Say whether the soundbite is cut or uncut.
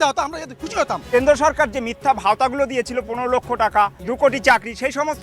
cut